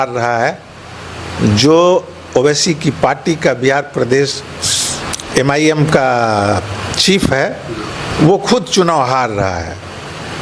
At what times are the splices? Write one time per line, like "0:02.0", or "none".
none